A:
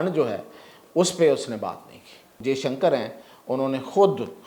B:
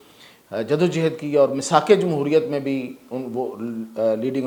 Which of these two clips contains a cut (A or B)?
A